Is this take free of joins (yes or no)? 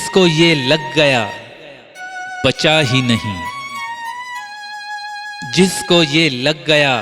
no